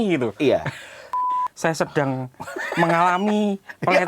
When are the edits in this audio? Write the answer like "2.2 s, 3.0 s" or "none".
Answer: 1.3 s